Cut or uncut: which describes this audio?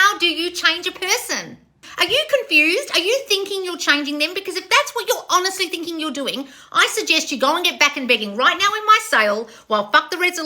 cut